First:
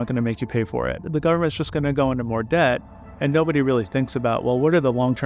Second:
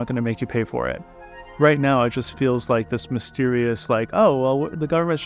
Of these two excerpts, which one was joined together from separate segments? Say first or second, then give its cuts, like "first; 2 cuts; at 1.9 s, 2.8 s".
first; 1 cut; at 1.1 s